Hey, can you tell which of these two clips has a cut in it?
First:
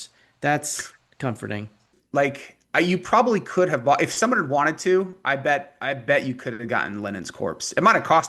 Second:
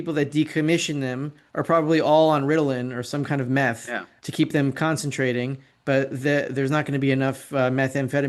first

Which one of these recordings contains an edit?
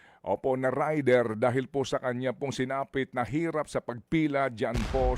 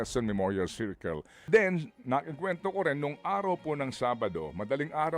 second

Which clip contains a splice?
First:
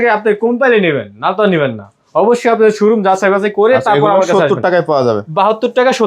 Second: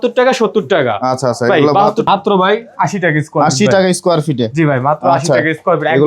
second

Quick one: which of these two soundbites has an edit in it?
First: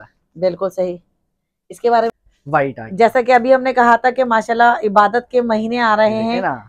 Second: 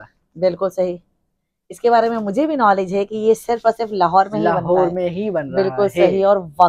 first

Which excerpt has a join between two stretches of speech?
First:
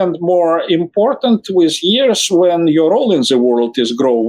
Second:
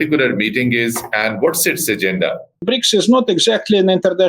second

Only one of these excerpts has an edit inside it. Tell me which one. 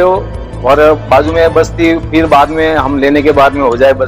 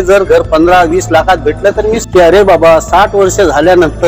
second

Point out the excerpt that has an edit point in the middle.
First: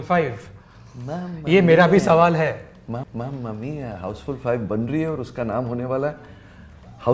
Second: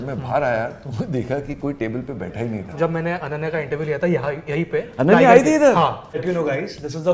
second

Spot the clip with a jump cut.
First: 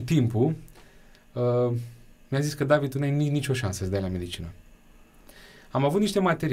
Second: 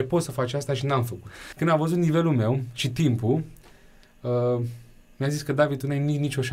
second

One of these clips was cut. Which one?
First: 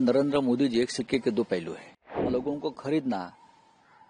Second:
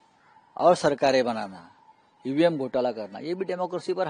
first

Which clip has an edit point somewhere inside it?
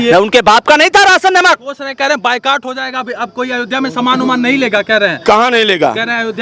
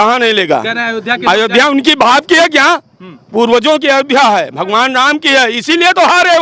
first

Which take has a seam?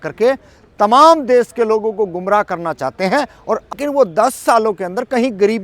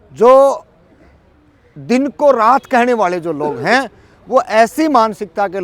first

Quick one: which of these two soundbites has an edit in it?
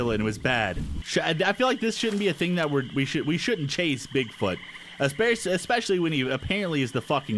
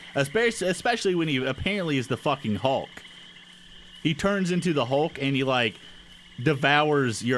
first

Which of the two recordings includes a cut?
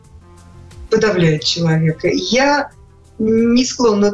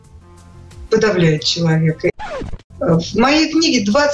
second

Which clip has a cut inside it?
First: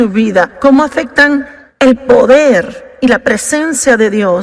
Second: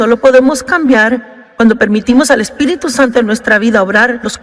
first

